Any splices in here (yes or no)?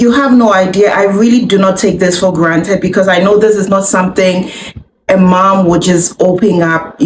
no